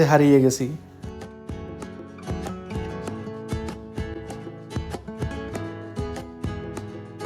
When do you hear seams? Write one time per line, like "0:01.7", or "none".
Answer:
none